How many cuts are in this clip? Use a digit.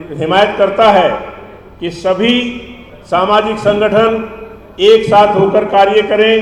0